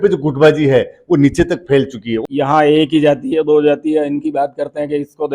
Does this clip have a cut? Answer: yes; 1 cut; at 2.1 s

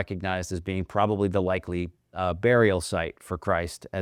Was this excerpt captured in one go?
yes; 0 cuts

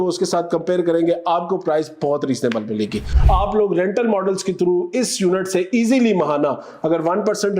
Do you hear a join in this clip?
yes; 1 cut; at 3.1 s

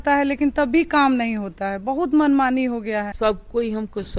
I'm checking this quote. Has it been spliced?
yes; 1 cut; at 3.1 s

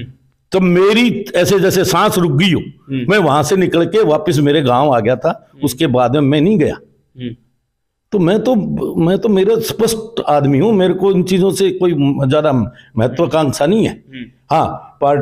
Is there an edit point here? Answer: no; 0 cuts

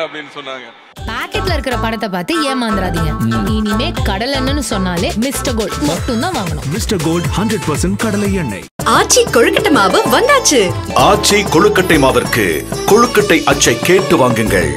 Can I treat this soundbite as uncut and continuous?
no; 1 cut; at 1.0 s

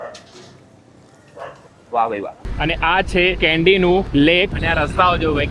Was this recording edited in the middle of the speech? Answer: yes; 3 cuts; at 2.4 s, 3.4 s, 4.3 s

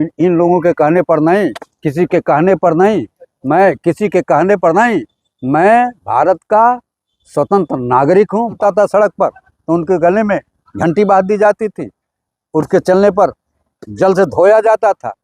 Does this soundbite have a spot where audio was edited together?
yes; 1 cut; at 8.6 s

